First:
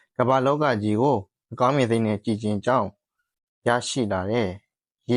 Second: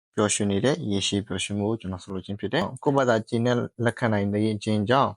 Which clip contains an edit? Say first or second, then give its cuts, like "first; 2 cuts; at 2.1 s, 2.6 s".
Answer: second; 1 cut; at 2.7 s